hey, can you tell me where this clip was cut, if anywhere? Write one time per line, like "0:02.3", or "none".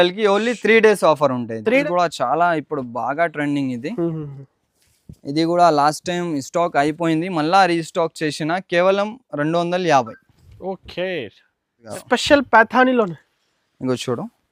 0:01.8
0:11.8